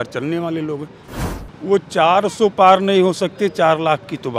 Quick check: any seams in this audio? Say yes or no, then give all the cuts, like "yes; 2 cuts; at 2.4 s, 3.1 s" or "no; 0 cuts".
yes; 1 cut; at 1.0 s